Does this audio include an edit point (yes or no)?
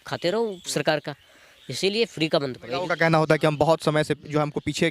yes